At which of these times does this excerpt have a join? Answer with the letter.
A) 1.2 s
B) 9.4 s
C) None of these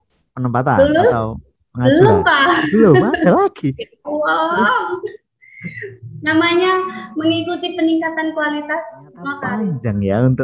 B